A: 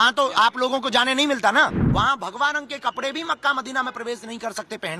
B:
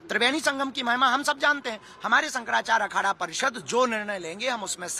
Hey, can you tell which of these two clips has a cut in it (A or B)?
A